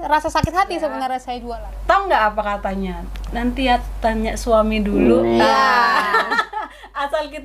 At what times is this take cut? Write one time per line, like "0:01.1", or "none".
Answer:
0:01.3